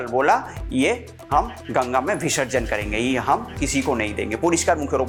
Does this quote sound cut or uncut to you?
uncut